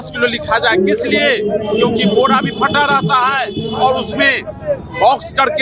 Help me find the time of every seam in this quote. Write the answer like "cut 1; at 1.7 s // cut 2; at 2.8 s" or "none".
none

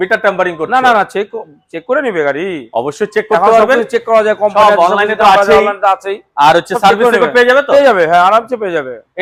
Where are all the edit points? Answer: none

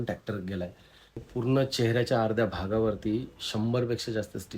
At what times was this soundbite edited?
cut 1; at 1.3 s

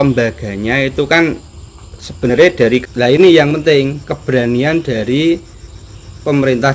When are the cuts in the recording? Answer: cut 1; at 2.8 s

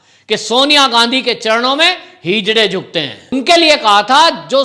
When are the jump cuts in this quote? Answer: cut 1; at 3.3 s

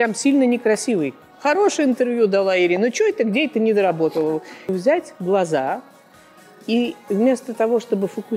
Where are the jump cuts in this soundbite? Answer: cut 1; at 1.3 s // cut 2; at 4.7 s

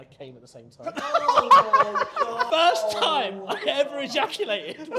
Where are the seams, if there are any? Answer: cut 1; at 2.4 s

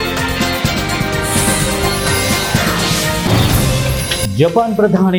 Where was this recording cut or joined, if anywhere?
none

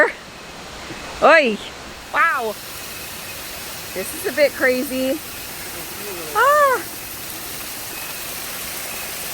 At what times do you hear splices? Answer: cut 1; at 2.6 s

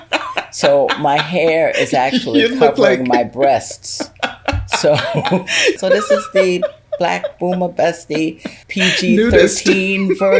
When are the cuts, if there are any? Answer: cut 1; at 5.8 s // cut 2; at 8.5 s

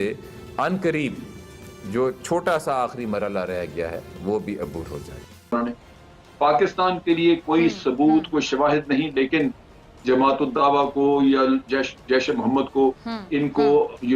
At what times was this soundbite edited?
cut 1; at 5.5 s

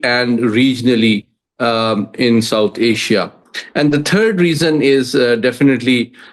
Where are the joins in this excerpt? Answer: none

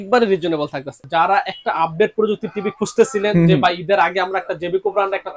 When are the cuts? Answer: cut 1; at 1.0 s

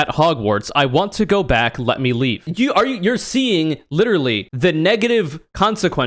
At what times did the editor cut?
cut 1; at 2.5 s // cut 2; at 4.5 s

